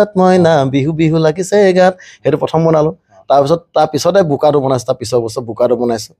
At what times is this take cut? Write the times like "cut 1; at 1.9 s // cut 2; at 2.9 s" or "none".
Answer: none